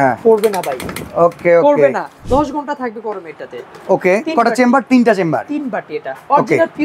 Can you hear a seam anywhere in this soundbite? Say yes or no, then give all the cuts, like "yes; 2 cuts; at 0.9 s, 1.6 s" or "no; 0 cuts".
yes; 1 cut; at 2.2 s